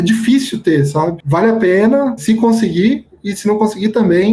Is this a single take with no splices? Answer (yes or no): no